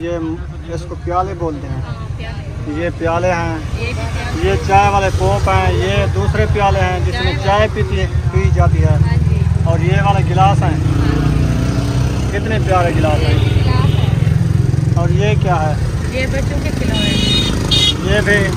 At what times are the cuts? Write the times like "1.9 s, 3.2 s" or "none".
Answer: none

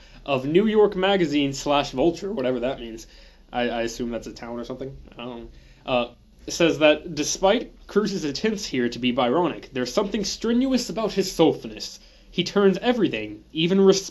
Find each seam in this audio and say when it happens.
none

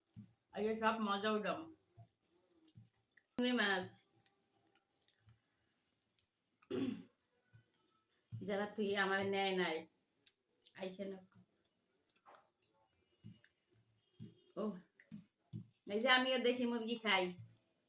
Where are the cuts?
3.4 s

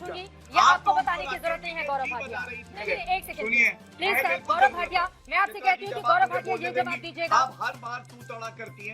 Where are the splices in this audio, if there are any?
2.7 s, 5.2 s

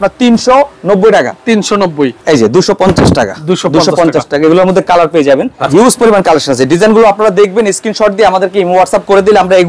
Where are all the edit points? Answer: 2.2 s, 5.6 s

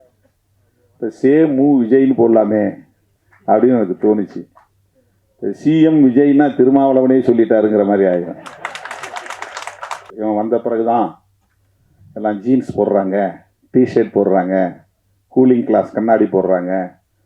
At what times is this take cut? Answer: 10.1 s

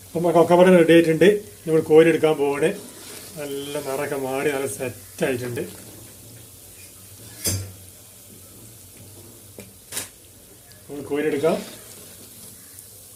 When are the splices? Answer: none

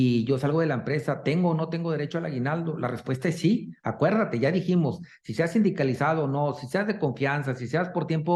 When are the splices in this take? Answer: none

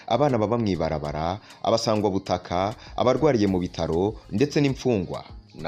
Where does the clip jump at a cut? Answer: none

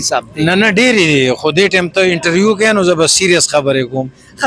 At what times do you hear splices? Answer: none

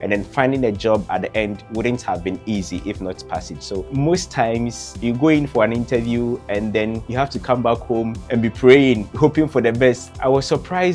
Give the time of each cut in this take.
3.9 s, 4.8 s, 7.0 s, 8.2 s, 9.1 s, 10.1 s

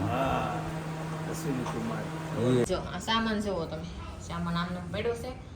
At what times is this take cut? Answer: 2.7 s

